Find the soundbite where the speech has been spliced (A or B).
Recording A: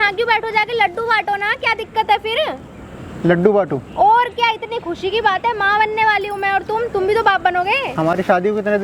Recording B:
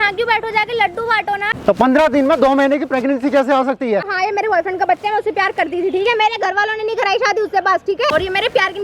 B